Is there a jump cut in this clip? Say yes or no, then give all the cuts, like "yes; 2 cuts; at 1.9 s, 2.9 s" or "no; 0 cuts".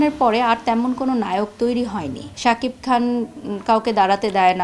yes; 1 cut; at 2.2 s